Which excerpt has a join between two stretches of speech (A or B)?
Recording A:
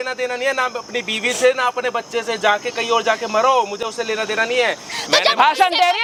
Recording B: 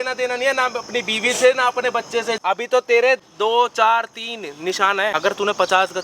B